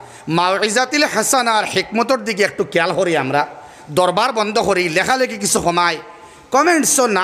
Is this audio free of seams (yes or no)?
yes